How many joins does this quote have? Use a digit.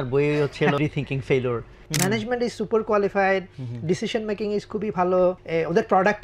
3